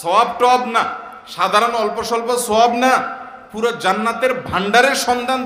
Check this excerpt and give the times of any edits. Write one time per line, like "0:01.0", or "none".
none